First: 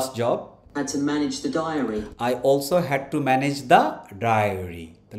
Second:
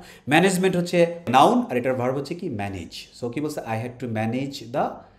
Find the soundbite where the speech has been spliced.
second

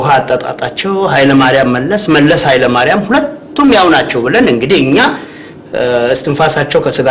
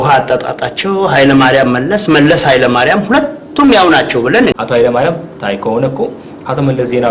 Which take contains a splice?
second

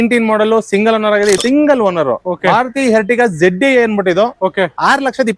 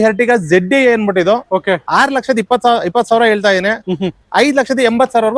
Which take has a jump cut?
first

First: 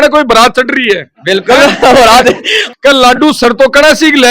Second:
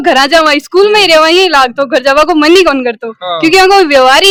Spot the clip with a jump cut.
first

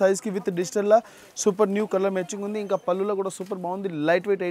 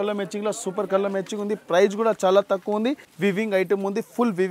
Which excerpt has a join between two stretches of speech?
second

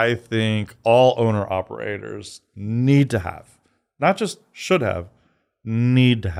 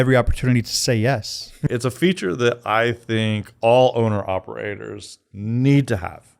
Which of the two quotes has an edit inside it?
second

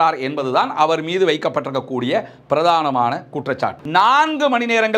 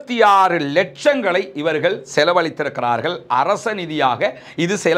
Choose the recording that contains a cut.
first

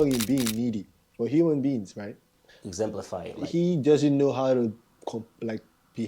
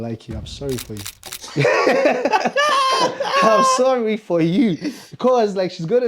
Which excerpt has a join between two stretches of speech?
first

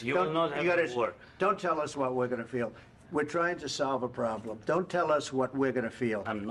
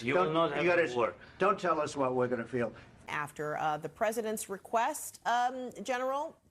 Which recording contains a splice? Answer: second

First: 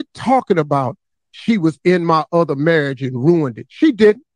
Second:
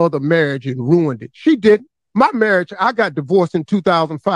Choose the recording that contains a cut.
first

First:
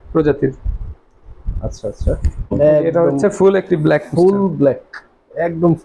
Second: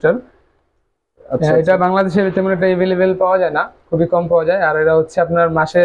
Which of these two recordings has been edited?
first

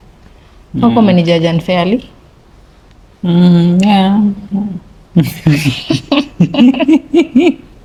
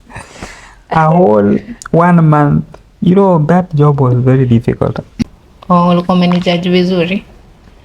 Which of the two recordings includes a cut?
second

